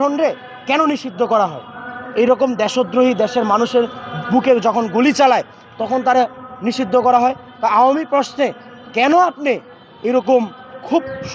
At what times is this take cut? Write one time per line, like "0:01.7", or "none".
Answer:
none